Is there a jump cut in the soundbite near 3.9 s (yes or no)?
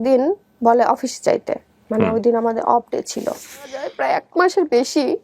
yes